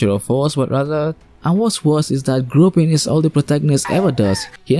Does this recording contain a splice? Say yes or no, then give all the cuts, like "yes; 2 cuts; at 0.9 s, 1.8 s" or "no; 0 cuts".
yes; 1 cut; at 1.3 s